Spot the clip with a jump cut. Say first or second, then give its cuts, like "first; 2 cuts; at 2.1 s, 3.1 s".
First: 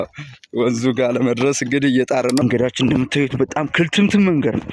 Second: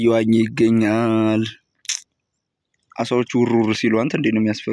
first; 1 cut; at 2.4 s